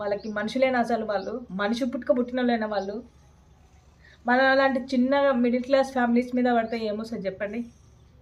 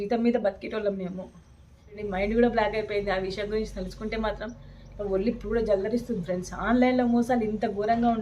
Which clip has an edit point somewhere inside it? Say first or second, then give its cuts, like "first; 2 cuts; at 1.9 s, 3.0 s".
second; 1 cut; at 2.0 s